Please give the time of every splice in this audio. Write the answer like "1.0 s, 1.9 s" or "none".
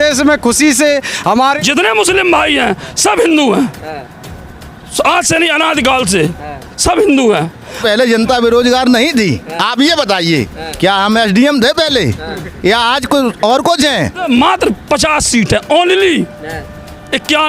1.6 s, 7.8 s, 14.2 s